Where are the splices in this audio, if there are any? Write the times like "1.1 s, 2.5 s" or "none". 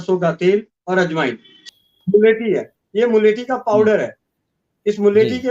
1.6 s